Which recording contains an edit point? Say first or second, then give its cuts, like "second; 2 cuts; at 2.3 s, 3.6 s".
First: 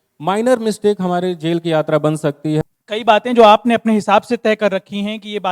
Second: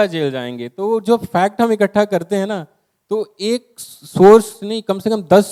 first; 1 cut; at 2.6 s